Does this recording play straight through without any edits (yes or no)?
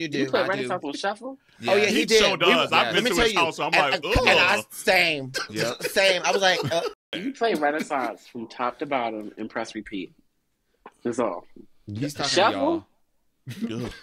no